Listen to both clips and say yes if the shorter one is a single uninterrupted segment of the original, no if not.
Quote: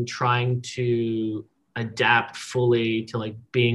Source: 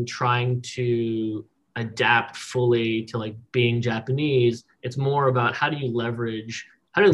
yes